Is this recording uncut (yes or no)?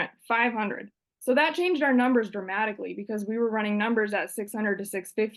yes